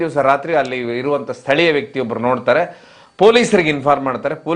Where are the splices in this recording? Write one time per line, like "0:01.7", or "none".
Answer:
none